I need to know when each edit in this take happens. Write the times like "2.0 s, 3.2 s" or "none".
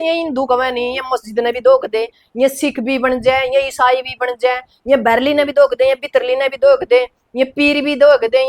none